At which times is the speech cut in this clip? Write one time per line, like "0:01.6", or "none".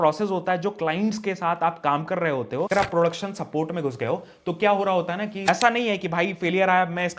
0:02.7
0:05.5